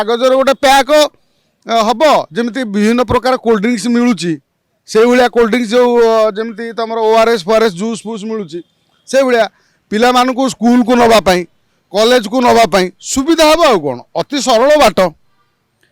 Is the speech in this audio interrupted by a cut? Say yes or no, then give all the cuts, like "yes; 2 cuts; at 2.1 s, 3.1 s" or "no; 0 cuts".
no; 0 cuts